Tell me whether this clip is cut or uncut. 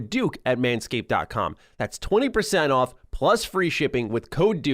uncut